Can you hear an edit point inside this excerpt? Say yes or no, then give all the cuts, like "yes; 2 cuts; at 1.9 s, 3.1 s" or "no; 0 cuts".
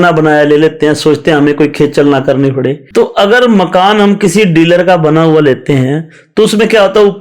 yes; 1 cut; at 2.8 s